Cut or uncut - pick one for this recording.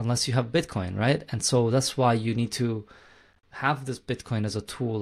uncut